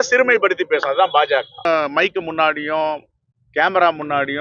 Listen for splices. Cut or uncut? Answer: cut